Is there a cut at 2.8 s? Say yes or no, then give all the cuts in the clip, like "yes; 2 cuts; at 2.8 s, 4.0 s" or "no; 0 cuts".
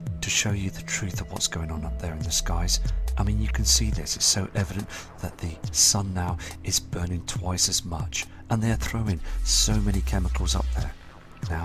no; 1 cut; at 5.6 s